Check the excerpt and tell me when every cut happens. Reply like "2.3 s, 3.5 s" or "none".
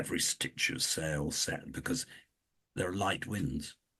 none